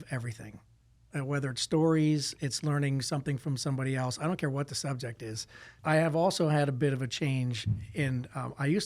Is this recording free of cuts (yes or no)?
no